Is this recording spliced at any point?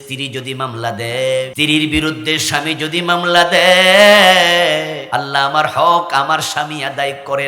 yes; 2 cuts; at 1.5 s, 5.0 s

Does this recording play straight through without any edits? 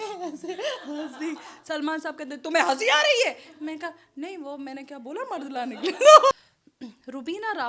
no; 1 cut; at 6.3 s

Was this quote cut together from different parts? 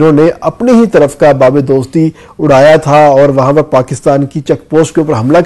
no; 0 cuts

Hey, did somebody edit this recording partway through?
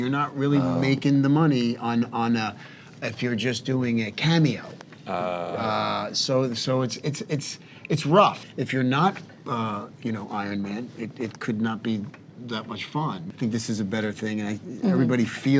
yes; 2 cuts; at 8.5 s, 13.3 s

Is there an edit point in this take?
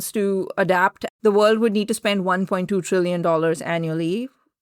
yes; 1 cut; at 1.0 s

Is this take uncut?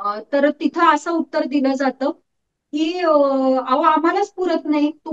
yes; 0 cuts

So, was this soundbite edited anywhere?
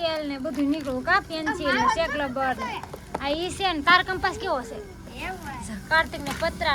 no; 0 cuts

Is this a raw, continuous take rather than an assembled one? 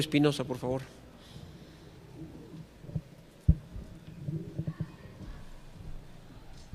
no; 1 cut; at 5.8 s

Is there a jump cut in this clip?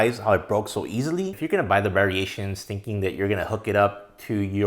yes; 1 cut; at 1.3 s

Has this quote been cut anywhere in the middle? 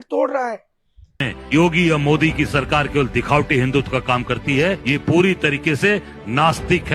yes; 1 cut; at 1.3 s

